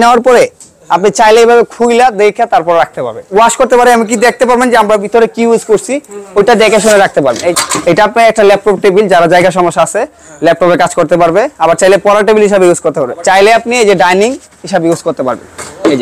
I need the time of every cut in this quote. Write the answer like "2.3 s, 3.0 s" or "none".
3.3 s, 7.5 s, 13.1 s